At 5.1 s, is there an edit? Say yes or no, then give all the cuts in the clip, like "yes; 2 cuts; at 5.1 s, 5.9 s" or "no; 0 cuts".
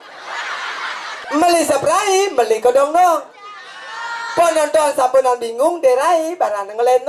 no; 1 cut; at 1.1 s